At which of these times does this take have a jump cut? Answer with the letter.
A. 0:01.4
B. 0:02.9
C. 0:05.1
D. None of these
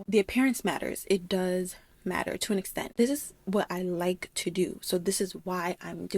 B